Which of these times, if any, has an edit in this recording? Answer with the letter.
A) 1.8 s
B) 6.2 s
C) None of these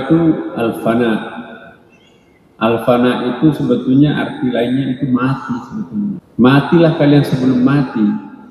B